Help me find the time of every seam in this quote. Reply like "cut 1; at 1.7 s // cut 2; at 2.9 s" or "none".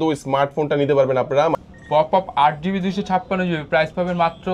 cut 1; at 1.5 s